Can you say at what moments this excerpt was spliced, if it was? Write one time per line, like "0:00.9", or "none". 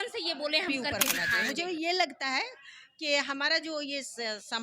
0:01.3